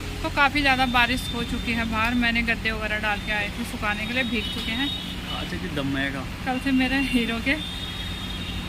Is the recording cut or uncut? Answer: uncut